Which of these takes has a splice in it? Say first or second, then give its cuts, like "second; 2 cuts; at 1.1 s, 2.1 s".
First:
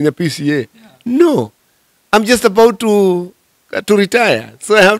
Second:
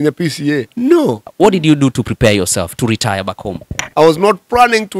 second; 2 cuts; at 1.0 s, 3.8 s